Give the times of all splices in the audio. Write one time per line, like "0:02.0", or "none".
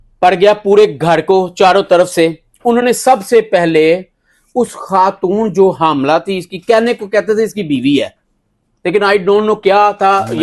none